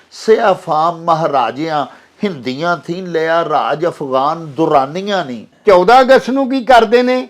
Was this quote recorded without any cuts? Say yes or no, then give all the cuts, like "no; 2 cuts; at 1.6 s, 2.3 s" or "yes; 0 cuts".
no; 1 cut; at 5.5 s